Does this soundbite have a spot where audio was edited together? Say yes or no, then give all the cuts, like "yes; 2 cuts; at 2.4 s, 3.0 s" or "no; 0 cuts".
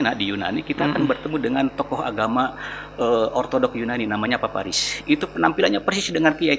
no; 0 cuts